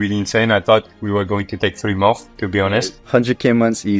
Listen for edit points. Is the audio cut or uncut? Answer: cut